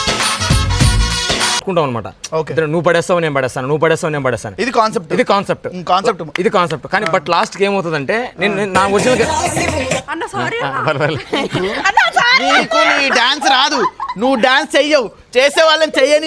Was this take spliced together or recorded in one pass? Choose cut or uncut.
cut